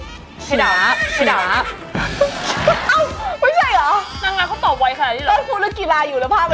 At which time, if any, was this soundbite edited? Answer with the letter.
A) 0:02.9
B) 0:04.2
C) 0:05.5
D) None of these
A